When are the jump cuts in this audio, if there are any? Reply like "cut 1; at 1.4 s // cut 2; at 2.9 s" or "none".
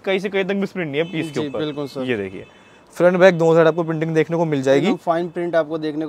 none